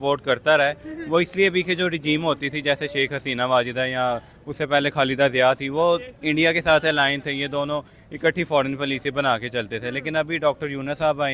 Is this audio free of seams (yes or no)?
yes